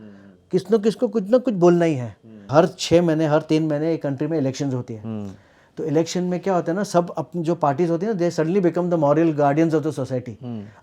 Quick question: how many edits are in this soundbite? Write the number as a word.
one